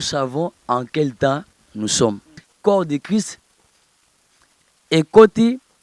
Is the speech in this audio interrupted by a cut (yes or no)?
yes